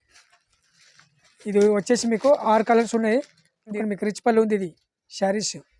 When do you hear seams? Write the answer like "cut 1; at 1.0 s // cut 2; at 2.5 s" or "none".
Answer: cut 1; at 3.7 s